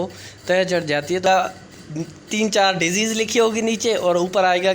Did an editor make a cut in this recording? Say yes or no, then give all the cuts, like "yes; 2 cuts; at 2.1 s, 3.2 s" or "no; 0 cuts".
yes; 1 cut; at 1.2 s